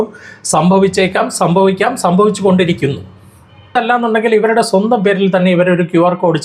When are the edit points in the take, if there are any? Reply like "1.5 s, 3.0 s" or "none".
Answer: 3.7 s

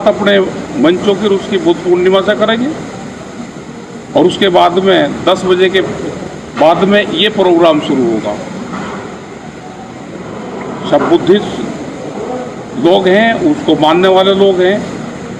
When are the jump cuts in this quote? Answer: none

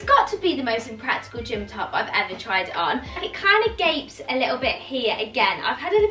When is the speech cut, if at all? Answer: none

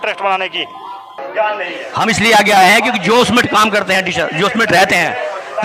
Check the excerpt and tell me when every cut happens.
1.1 s

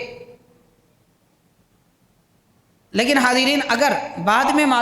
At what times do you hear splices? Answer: none

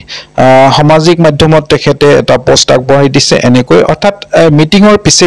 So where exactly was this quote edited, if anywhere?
none

